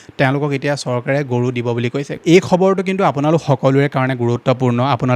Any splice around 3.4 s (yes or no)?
no